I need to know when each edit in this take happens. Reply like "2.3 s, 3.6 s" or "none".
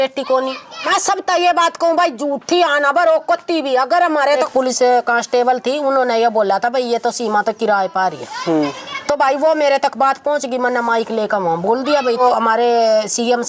0.9 s, 4.4 s, 12.2 s